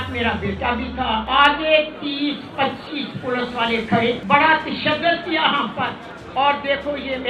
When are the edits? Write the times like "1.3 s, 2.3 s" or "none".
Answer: 1.2 s, 4.2 s

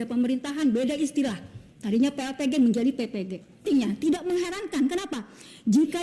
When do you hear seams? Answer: 3.7 s

